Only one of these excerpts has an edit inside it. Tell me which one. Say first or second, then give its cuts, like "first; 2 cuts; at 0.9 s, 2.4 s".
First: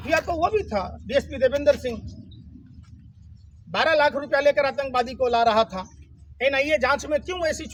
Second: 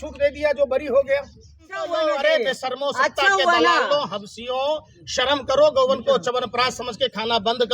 second; 1 cut; at 1.8 s